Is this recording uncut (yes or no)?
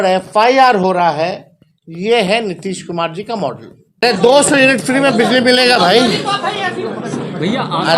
no